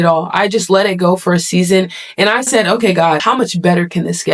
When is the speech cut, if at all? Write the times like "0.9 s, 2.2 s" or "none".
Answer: 3.2 s